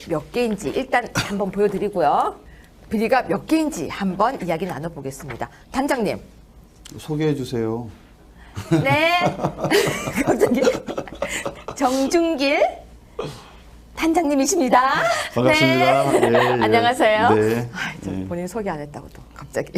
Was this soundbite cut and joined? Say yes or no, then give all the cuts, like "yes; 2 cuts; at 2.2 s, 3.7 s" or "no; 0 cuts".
yes; 1 cut; at 2.6 s